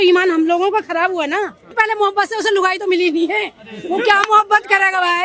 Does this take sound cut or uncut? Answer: cut